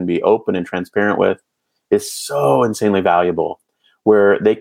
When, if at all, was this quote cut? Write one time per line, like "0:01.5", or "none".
none